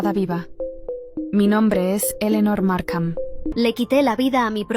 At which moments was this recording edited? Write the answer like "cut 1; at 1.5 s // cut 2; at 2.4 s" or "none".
cut 1; at 3.4 s